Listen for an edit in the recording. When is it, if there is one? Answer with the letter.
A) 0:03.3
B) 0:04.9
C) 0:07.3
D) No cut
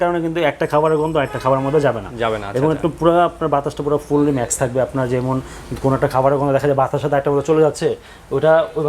D